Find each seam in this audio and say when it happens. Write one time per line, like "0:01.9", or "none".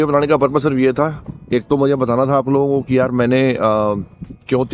none